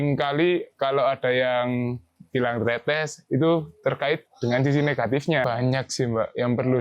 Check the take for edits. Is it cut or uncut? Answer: cut